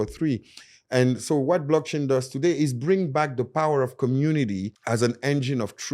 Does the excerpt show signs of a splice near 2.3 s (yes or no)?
no